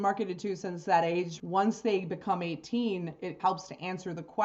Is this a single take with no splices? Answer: no; 2 cuts; at 1.4 s, 3.4 s

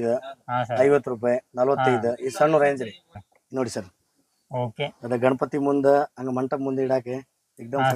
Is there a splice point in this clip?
yes; 1 cut; at 3.2 s

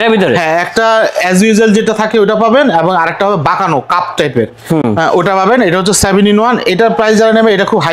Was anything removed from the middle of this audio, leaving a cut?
no; 0 cuts

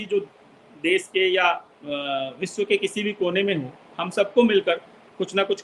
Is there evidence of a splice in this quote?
yes; 1 cut; at 1.7 s

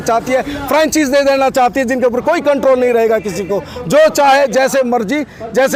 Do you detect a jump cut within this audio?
no; 0 cuts

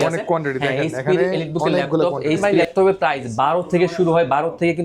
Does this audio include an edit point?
yes; 1 cut; at 2.4 s

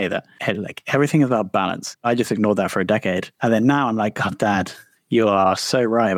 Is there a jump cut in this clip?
no; 0 cuts

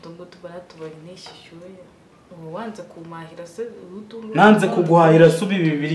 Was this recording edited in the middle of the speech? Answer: yes; 1 cut; at 2.1 s

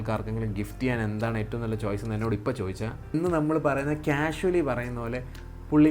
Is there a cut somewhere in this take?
yes; 1 cut; at 3.1 s

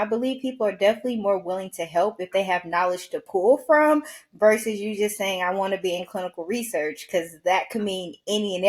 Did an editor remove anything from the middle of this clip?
no; 0 cuts

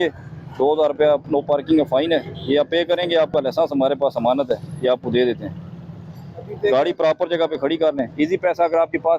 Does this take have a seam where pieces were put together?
no; 0 cuts

